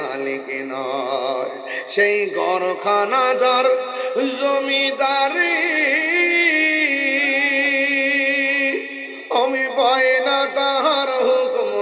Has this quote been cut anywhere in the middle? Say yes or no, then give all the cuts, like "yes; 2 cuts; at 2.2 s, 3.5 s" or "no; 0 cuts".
no; 0 cuts